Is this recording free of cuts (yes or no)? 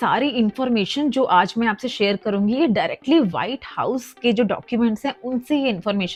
yes